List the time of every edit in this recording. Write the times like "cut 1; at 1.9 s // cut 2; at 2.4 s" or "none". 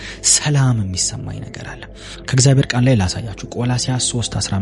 none